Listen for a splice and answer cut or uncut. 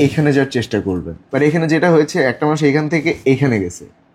cut